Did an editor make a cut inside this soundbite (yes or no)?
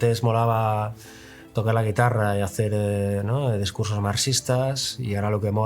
no